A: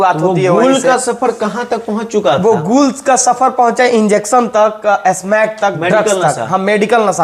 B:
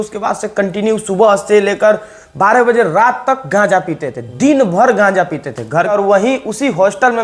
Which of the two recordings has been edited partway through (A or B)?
B